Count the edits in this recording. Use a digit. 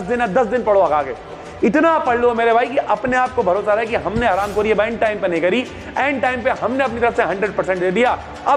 0